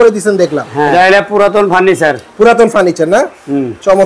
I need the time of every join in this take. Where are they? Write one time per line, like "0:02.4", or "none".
0:00.9